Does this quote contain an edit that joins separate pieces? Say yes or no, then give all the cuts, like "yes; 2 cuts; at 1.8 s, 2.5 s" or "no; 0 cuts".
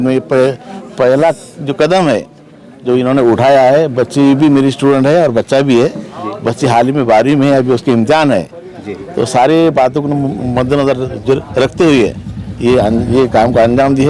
no; 0 cuts